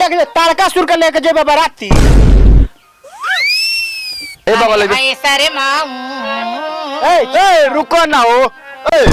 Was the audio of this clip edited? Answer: yes; 1 cut; at 4.5 s

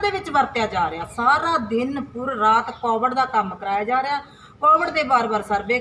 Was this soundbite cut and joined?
no; 0 cuts

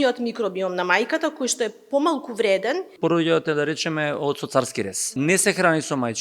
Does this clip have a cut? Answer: yes; 2 cuts; at 2.9 s, 5.1 s

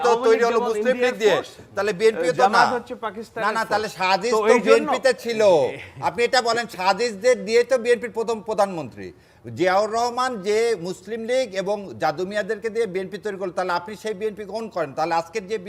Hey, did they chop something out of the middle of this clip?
no; 0 cuts

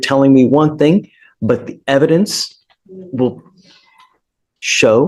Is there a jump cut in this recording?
no; 0 cuts

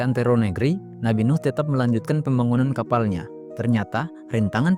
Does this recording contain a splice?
no; 0 cuts

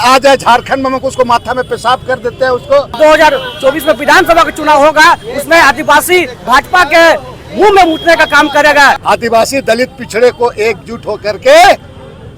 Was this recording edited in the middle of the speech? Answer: yes; 2 cuts; at 3.0 s, 9.0 s

